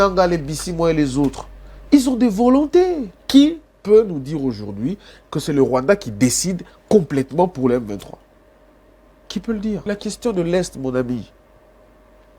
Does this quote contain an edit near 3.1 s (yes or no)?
yes